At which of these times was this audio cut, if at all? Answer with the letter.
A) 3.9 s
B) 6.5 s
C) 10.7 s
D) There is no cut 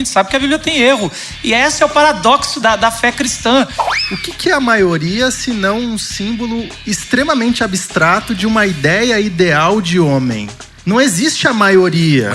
A